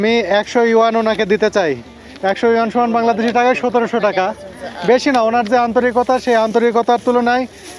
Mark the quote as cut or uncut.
uncut